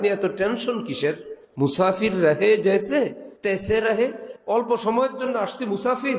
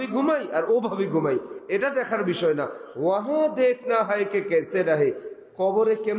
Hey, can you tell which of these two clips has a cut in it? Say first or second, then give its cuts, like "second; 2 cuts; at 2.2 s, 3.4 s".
first; 2 cuts; at 3.3 s, 4.3 s